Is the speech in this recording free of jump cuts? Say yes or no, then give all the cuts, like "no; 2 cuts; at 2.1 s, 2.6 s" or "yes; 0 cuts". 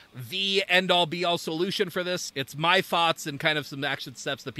yes; 0 cuts